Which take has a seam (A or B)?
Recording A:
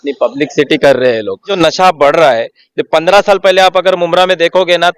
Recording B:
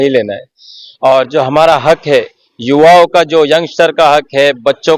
A